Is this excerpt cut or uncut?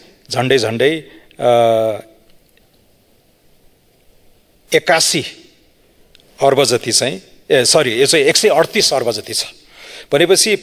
uncut